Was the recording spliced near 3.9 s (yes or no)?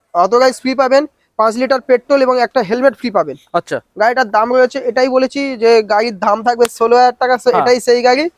no